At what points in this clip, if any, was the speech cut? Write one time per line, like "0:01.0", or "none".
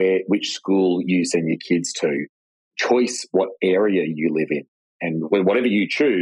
0:04.6